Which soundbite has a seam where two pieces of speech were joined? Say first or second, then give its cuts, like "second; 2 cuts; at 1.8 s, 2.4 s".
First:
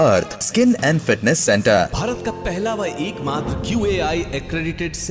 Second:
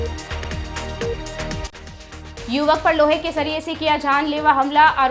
second; 1 cut; at 1.6 s